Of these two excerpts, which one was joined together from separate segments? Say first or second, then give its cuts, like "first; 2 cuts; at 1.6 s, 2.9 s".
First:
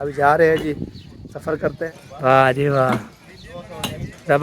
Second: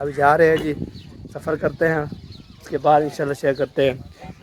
first; 1 cut; at 1.8 s